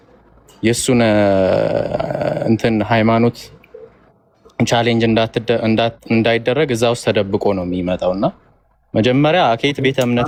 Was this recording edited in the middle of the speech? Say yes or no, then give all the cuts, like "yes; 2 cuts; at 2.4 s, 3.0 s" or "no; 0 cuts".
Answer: no; 0 cuts